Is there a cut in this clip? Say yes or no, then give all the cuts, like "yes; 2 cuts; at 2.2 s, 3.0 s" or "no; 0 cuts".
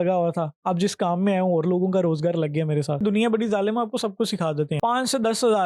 yes; 2 cuts; at 3.0 s, 4.7 s